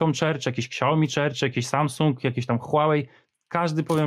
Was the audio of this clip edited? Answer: no; 0 cuts

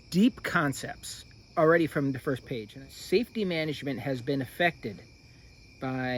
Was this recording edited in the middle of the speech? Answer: yes; 1 cut; at 2.7 s

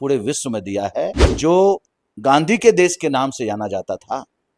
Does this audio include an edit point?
yes; 1 cut; at 1.2 s

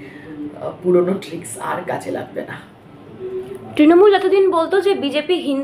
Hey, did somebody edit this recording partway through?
no; 0 cuts

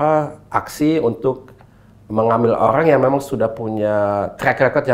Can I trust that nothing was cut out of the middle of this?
yes; 0 cuts

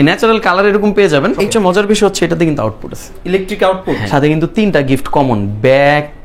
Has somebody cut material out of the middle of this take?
yes; 2 cuts; at 1.5 s, 4.0 s

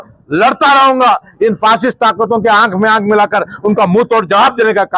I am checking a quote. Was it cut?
no; 0 cuts

